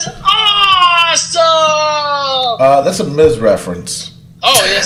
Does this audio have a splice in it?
no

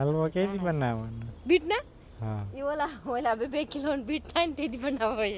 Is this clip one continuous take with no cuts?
yes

